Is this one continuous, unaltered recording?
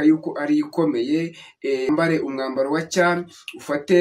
no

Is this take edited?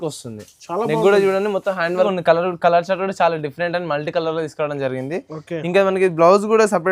yes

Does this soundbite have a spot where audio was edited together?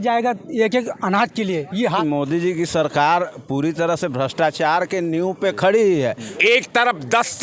yes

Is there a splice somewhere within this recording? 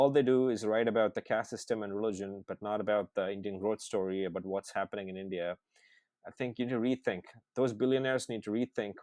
no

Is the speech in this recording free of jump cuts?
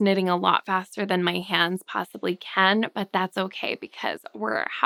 yes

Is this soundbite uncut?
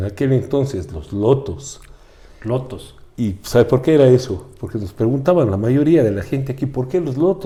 yes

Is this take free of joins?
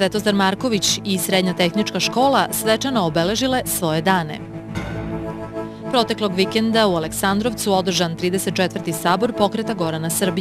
yes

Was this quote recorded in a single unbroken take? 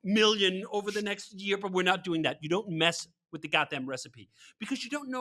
yes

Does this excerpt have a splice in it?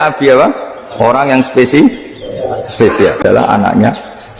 yes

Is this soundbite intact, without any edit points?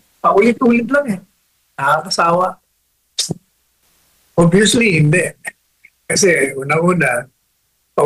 yes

